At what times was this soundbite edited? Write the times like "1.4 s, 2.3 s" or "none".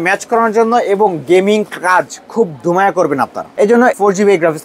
3.6 s

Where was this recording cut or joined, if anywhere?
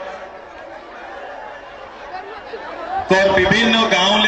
none

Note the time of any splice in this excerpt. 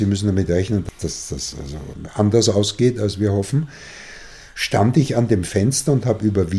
0.8 s, 1.9 s

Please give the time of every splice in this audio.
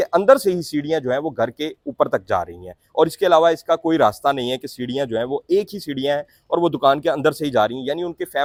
none

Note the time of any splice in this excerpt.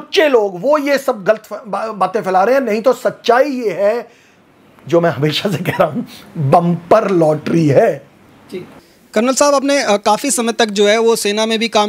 none

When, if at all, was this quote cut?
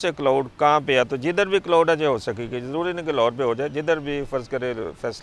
none

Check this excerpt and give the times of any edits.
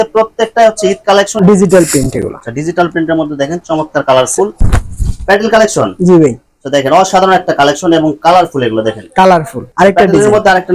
1.3 s, 4.5 s, 9.6 s

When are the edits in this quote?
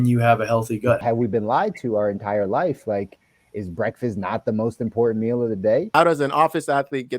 1.0 s, 5.9 s

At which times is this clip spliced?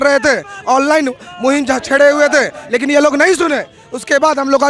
none

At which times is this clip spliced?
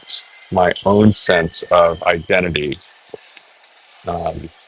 none

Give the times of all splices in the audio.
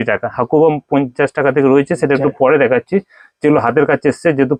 none

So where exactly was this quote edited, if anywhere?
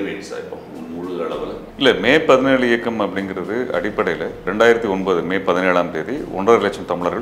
4.4 s

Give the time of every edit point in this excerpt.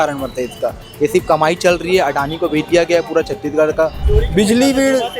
4.0 s

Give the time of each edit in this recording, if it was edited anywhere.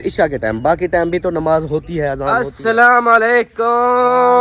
2.5 s

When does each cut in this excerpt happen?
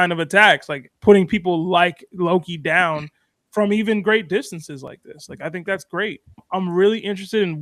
none

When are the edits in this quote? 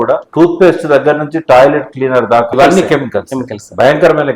2.5 s

